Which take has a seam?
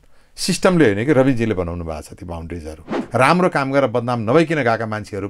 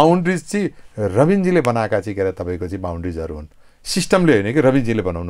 first; 1 cut; at 2.9 s

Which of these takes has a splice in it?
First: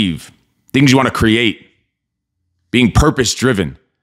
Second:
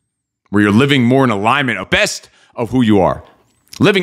second; 1 cut; at 1.9 s

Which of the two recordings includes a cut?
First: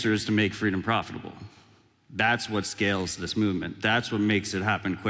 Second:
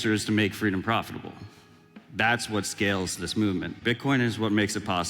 second; 1 cut; at 3.8 s

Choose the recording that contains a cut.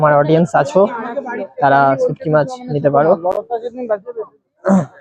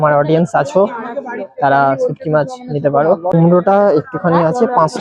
second; 1 cut; at 3.3 s

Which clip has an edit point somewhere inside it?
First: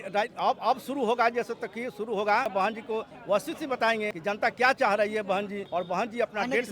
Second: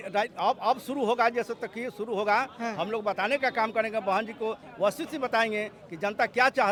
first; 3 cuts; at 2.5 s, 4.1 s, 5.6 s

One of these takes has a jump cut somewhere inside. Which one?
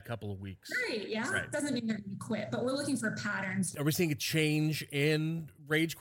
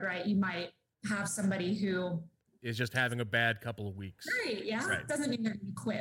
first; 1 cut; at 3.7 s

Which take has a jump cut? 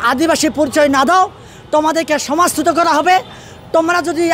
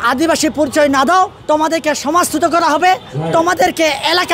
second; 2 cuts; at 1.4 s, 3.1 s

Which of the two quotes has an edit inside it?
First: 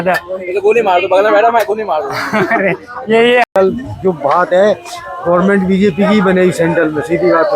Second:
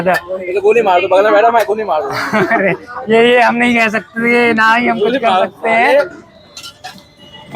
first; 1 cut; at 3.6 s

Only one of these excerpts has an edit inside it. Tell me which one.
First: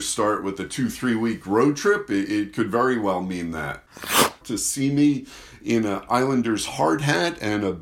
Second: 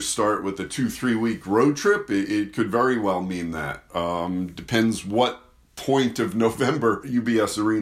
first; 1 cut; at 4.3 s

